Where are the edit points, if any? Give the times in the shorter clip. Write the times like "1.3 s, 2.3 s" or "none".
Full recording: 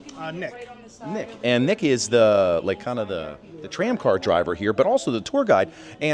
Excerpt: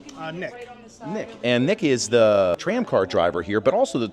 2.6 s